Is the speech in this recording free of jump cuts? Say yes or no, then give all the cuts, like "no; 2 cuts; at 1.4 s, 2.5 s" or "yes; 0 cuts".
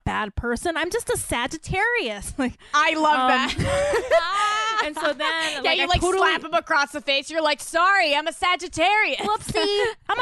yes; 0 cuts